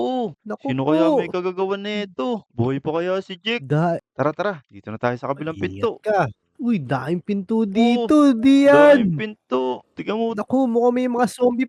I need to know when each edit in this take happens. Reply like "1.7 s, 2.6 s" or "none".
4.1 s